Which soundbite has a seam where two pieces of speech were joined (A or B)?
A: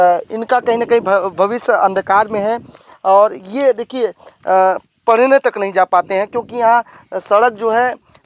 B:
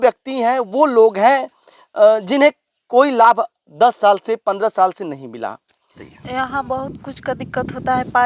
B